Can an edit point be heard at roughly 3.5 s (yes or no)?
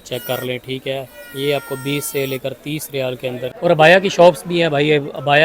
yes